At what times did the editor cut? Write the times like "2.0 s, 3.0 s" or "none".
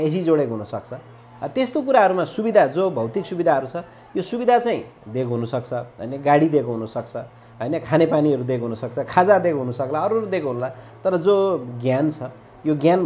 none